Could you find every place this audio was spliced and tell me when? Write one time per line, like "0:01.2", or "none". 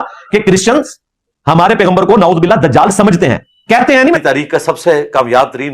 0:04.2